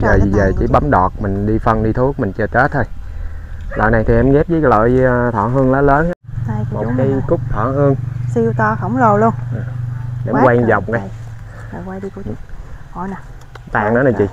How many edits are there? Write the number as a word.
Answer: one